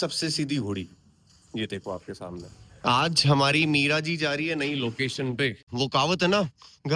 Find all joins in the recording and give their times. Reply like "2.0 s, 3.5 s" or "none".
2.5 s, 5.7 s